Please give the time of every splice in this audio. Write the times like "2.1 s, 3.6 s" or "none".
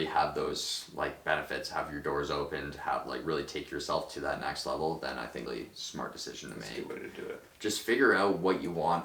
5.5 s, 7.5 s